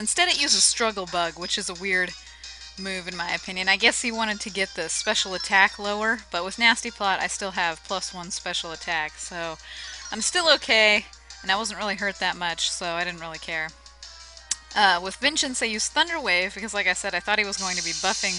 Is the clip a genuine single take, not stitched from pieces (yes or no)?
no